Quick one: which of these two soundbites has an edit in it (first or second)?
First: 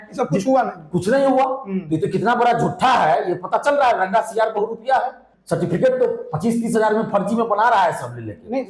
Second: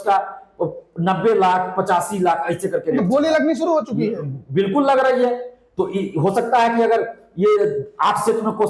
first